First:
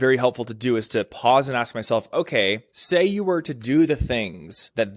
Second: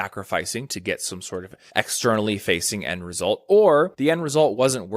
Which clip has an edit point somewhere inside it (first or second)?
second